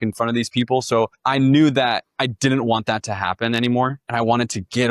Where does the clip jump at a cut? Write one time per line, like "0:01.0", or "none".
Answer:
0:01.2
0:02.1
0:04.0